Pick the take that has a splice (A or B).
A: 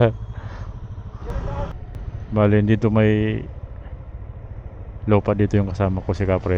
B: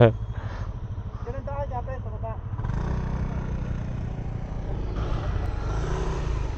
A